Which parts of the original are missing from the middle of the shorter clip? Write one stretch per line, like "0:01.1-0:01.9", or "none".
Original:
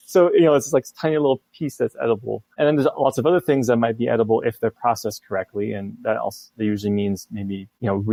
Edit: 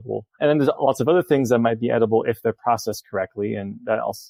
none